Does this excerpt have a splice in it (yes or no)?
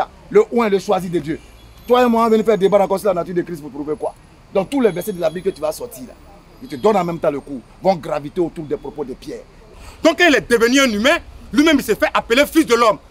yes